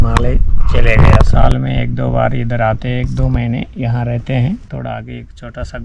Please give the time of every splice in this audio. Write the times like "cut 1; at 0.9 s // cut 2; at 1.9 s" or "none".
cut 1; at 1.3 s // cut 2; at 4.7 s